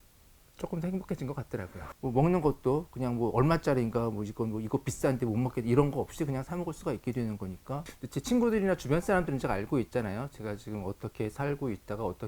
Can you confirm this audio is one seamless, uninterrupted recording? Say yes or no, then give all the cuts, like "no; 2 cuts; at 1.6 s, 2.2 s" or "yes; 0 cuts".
no; 2 cuts; at 1.8 s, 8.0 s